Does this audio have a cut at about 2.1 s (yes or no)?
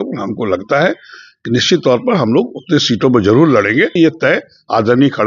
no